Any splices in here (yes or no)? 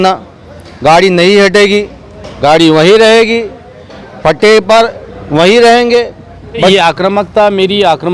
yes